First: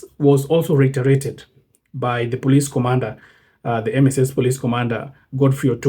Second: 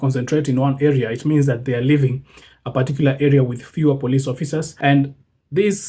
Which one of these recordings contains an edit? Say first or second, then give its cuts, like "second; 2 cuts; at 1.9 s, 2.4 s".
second; 1 cut; at 4.7 s